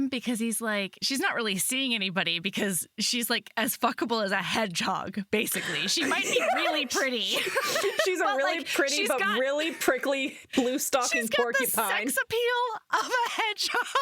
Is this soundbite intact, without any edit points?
no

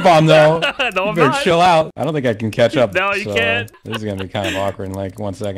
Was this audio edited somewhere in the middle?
yes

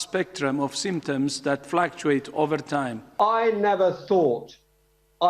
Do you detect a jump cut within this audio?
yes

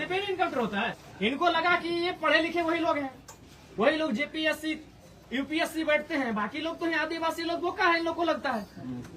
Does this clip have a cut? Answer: yes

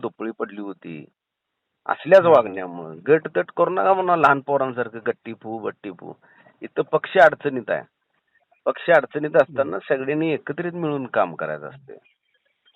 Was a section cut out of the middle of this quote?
no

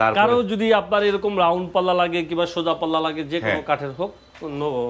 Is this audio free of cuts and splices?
yes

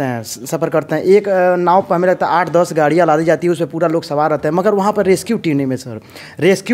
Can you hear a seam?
no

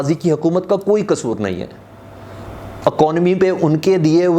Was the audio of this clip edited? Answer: no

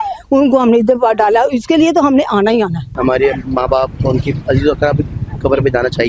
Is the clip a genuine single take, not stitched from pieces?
no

